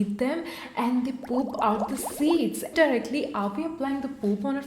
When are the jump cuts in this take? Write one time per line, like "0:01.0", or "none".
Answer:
0:02.7